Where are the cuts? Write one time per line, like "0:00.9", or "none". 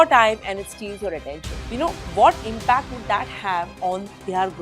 0:01.6